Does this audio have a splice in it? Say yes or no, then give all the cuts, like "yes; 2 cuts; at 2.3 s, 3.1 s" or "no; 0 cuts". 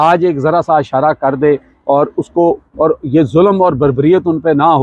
no; 0 cuts